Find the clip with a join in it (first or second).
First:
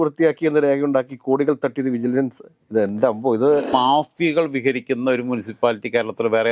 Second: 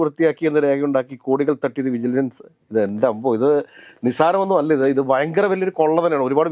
first